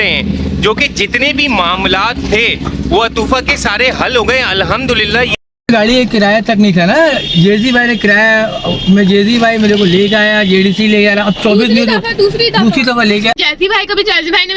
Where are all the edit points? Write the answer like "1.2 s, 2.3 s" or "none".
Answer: 5.3 s, 13.3 s